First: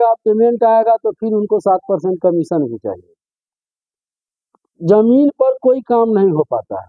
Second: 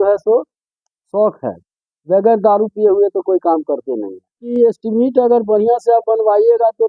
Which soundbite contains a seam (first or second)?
second